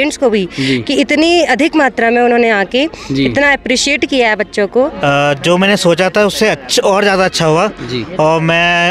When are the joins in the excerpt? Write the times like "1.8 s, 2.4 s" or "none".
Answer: 4.9 s